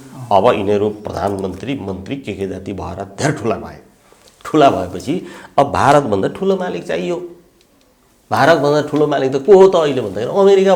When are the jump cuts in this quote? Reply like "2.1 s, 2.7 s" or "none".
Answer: none